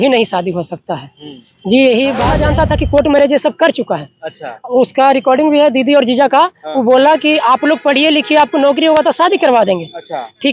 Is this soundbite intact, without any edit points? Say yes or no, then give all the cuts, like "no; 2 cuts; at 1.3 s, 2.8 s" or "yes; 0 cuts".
no; 1 cut; at 2.3 s